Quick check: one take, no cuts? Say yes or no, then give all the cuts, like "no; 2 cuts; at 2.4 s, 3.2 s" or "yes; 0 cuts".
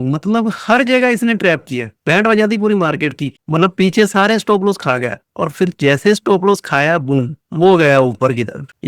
no; 1 cut; at 3.4 s